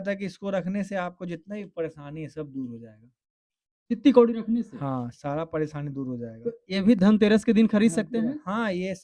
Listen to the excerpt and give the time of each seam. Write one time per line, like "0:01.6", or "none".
none